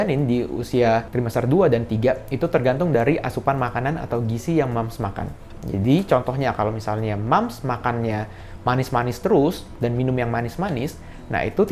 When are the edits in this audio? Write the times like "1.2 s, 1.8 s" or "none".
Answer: none

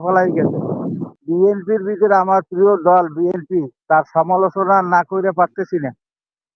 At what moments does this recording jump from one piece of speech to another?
1.1 s

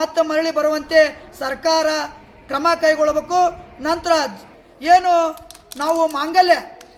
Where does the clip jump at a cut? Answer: none

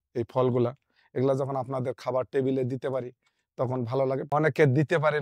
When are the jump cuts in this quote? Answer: 4.3 s

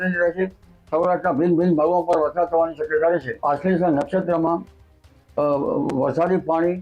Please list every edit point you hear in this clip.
3.3 s

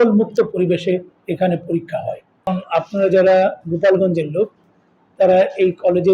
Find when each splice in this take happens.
2.5 s

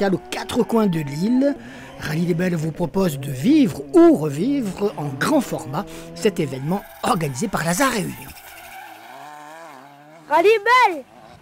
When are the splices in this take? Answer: 8.3 s

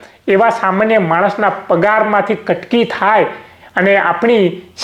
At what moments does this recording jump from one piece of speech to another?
none

